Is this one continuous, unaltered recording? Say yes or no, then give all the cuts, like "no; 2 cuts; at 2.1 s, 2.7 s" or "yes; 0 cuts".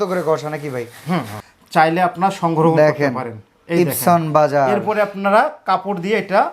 no; 1 cut; at 1.4 s